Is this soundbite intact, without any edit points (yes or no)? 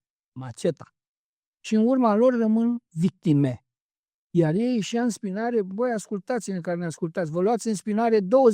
yes